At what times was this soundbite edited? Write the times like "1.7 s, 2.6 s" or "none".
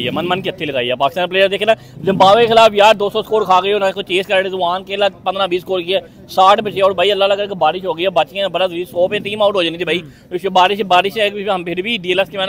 none